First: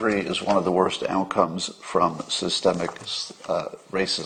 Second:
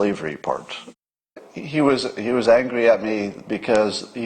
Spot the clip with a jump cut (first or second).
second